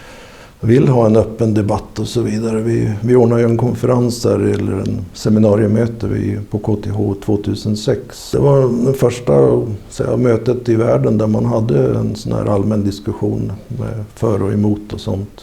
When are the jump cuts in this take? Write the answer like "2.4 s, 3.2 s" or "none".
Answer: 8.1 s